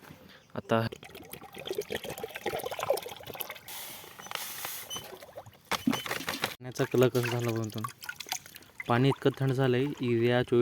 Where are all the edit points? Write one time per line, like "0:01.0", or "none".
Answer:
0:00.9
0:03.6
0:06.6

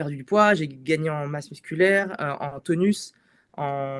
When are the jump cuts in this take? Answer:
none

